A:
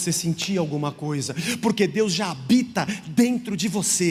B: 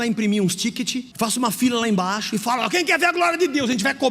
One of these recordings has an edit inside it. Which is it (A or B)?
B